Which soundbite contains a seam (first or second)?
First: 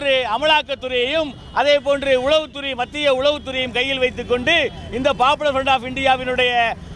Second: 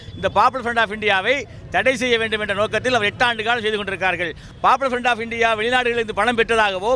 second